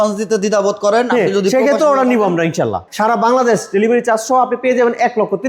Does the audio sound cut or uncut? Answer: cut